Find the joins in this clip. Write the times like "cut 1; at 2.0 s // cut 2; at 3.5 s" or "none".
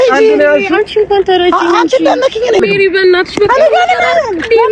cut 1; at 2.6 s